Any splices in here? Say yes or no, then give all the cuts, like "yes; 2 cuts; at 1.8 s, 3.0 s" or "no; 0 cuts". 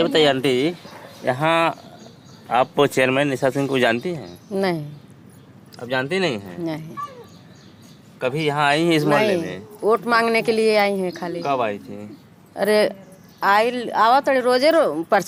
no; 0 cuts